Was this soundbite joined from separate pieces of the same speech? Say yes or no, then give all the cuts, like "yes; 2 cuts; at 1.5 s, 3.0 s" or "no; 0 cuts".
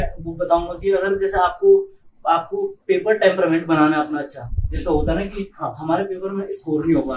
no; 0 cuts